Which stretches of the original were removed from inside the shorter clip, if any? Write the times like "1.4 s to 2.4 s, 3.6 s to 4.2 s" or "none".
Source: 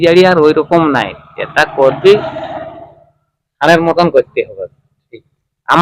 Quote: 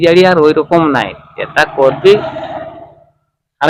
none